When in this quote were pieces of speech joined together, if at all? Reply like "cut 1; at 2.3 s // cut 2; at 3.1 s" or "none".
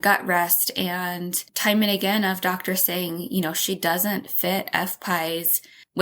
cut 1; at 1.5 s